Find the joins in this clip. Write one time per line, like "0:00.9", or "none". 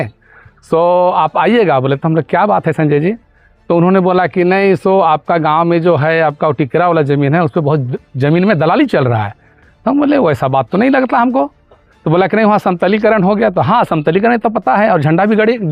none

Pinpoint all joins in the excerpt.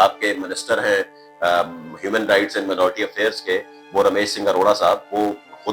none

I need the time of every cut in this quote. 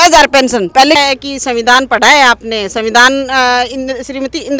0:01.0

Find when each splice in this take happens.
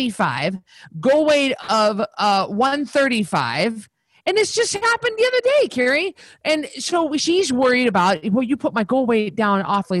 0:07.2

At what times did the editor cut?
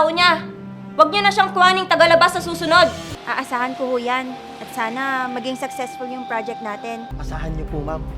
0:03.1
0:07.1

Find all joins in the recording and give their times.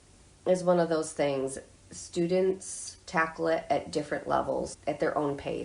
0:04.7

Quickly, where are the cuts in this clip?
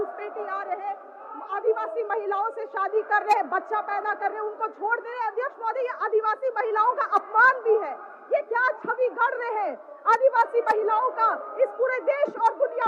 none

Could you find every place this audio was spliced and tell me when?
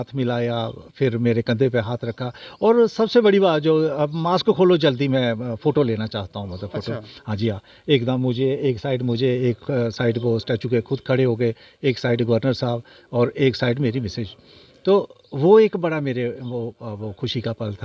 none

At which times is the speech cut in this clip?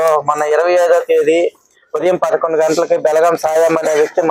none

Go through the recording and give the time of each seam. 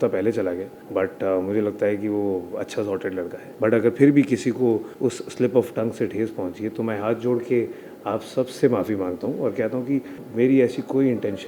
0:03.5
0:04.9
0:10.2

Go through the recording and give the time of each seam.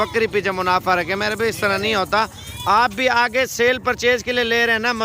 none

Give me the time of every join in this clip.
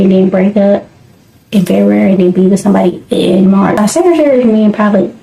0:03.8

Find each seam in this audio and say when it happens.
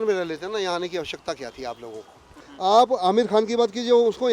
0:02.4

